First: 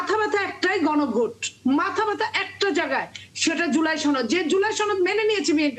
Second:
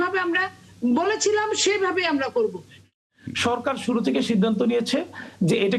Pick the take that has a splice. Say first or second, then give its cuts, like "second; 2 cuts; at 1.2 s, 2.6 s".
second; 1 cut; at 2.9 s